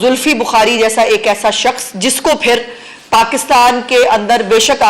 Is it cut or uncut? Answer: uncut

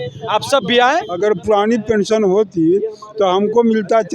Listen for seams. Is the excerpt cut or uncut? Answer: cut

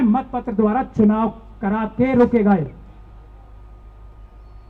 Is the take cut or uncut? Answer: uncut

